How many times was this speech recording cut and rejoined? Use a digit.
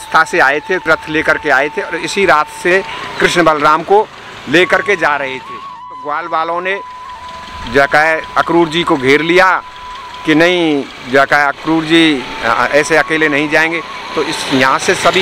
3